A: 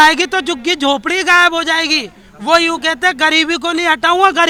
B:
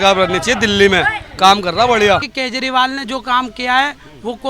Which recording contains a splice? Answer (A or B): B